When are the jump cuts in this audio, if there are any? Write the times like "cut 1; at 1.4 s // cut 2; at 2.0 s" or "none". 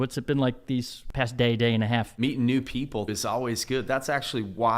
cut 1; at 1.0 s // cut 2; at 2.2 s // cut 3; at 3.1 s